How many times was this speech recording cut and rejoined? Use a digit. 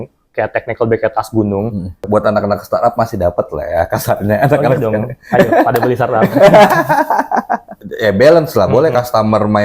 2